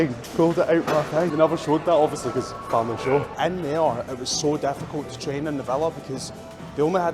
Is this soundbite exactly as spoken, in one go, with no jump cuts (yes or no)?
no